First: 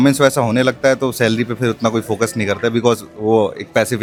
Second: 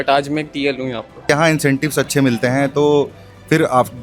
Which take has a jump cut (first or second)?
second